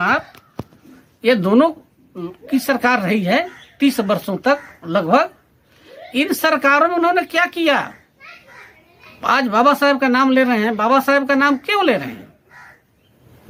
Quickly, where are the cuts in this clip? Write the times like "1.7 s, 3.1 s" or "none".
none